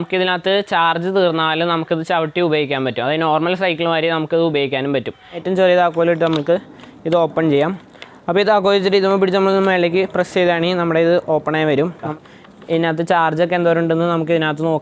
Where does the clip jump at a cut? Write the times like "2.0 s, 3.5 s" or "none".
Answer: 5.3 s, 12.1 s